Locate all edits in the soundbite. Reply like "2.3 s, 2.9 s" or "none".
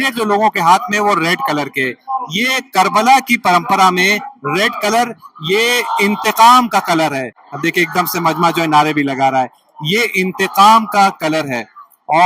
none